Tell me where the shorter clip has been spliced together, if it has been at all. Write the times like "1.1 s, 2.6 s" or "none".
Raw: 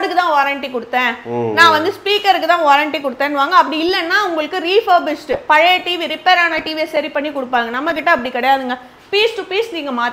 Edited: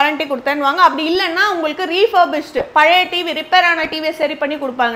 none